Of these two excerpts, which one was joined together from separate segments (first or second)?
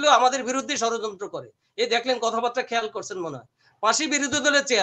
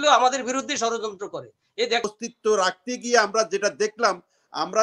second